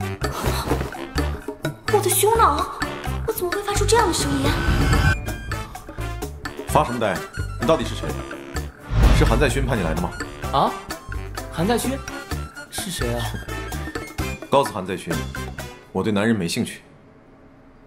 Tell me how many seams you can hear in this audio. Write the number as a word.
one